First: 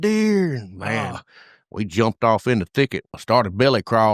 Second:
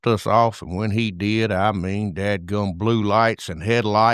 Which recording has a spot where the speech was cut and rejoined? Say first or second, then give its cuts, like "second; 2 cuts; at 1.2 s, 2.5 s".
first; 1 cut; at 3.1 s